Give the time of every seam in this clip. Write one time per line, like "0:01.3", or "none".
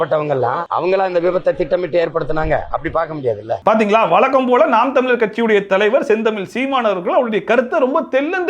none